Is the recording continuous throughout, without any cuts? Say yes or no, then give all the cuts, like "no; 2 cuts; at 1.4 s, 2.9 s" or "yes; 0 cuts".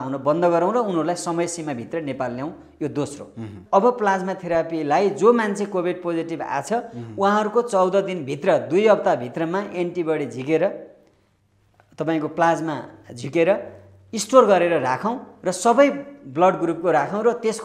no; 1 cut; at 3.5 s